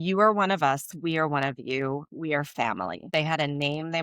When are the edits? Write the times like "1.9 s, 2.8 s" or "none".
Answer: 3.1 s